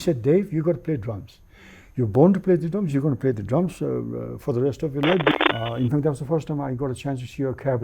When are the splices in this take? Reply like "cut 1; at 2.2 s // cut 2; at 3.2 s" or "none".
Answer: cut 1; at 5.4 s